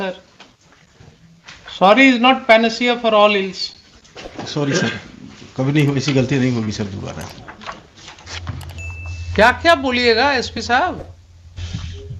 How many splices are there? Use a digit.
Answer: 1